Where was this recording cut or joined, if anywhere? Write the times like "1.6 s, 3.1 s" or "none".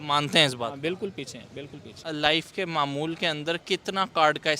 2.0 s